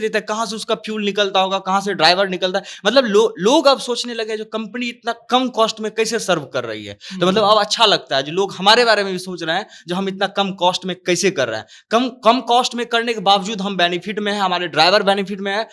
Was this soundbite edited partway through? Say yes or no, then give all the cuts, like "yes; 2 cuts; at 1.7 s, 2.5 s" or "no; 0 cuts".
no; 0 cuts